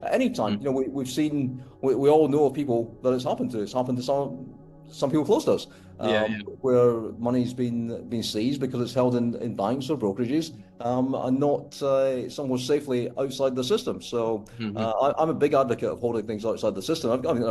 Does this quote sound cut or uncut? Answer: uncut